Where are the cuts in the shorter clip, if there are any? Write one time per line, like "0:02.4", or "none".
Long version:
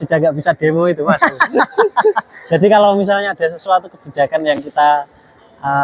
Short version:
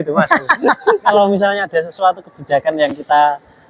0:01.1